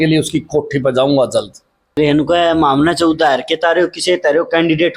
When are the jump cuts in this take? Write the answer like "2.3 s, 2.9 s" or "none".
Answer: 2.0 s